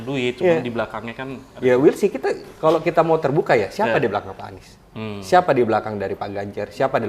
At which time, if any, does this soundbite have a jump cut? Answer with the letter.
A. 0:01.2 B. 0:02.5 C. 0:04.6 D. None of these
D